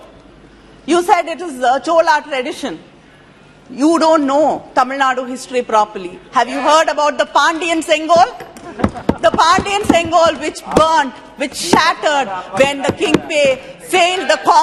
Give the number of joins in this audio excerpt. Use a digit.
0